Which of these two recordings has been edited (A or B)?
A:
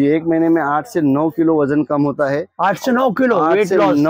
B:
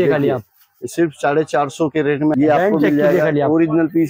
B